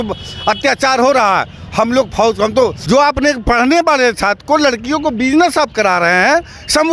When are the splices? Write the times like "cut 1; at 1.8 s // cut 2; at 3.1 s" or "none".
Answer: cut 1; at 2.8 s